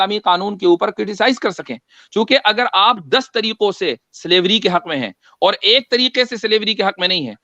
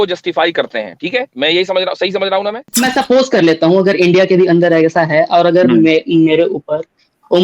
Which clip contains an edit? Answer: second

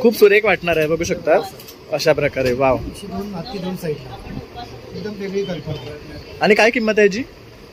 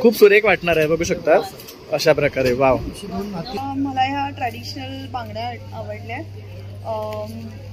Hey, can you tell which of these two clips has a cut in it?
second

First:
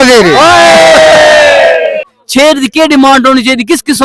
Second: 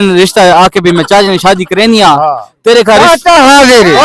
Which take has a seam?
first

